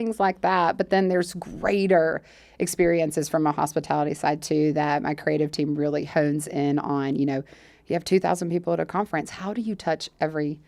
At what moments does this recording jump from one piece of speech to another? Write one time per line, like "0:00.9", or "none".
none